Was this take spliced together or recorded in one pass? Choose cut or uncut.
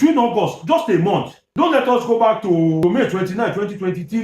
cut